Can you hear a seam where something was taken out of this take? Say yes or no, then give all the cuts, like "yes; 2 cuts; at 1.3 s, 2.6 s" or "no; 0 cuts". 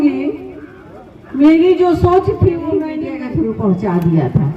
yes; 1 cut; at 2.9 s